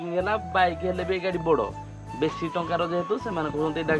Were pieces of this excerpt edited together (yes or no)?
no